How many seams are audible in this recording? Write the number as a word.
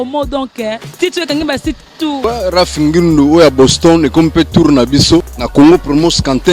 two